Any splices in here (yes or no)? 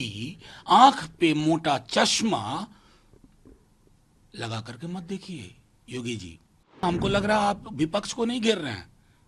yes